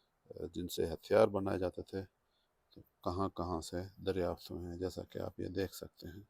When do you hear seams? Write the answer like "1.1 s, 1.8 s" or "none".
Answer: none